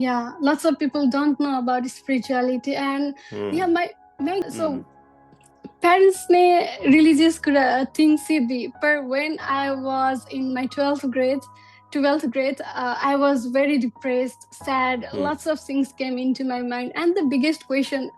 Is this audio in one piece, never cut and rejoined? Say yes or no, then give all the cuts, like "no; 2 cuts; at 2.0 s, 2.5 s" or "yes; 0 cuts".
no; 1 cut; at 4.4 s